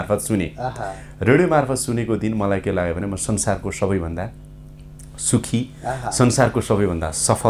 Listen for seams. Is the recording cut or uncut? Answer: uncut